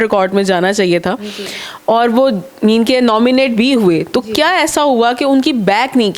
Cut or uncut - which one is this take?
uncut